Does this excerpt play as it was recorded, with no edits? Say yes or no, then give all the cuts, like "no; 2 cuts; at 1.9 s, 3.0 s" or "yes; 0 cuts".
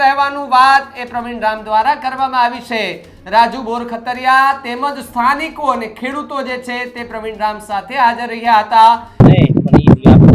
no; 1 cut; at 9.2 s